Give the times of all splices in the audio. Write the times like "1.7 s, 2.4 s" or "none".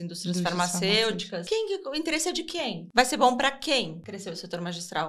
1.4 s, 2.8 s, 4.0 s